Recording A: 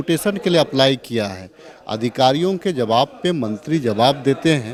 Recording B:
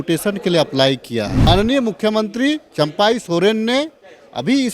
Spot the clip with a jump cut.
B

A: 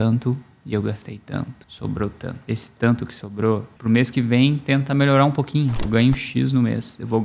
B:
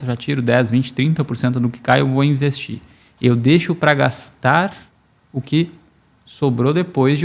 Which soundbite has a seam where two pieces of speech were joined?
A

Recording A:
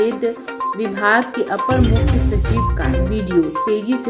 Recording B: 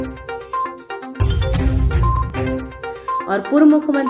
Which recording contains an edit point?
B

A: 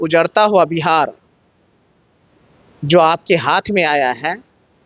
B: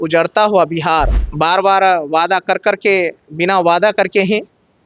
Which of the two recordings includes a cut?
B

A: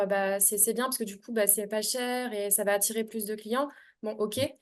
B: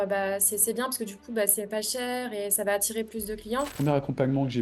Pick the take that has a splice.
B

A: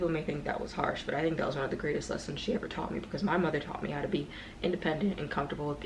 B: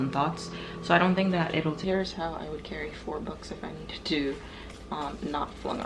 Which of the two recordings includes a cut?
B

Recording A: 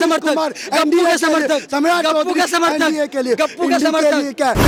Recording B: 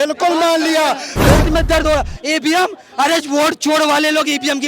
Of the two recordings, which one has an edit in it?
B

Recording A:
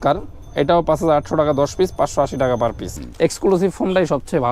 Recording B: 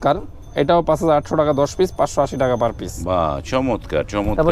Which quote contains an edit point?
A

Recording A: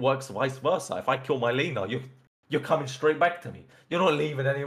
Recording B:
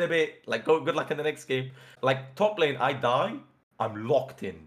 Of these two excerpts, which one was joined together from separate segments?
B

